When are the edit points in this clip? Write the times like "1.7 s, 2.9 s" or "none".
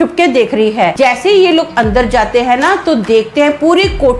1.0 s